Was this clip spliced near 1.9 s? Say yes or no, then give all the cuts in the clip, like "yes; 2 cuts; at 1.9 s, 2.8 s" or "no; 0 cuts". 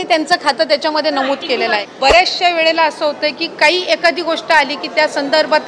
yes; 1 cut; at 1.9 s